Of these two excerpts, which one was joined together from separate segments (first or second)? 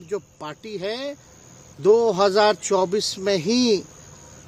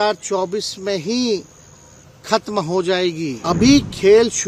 second